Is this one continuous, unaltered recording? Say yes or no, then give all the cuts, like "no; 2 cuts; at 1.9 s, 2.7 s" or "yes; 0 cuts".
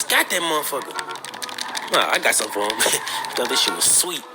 no; 1 cut; at 1.7 s